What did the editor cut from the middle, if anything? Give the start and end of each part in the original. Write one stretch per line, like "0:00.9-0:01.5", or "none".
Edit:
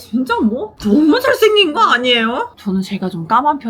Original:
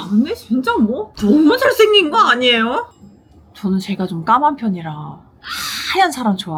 0:02.9-0:03.5